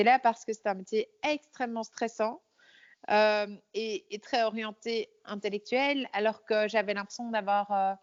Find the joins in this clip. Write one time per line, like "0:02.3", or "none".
none